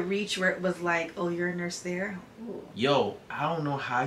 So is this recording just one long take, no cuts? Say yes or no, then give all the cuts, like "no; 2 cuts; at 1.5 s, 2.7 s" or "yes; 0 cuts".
no; 1 cut; at 2.7 s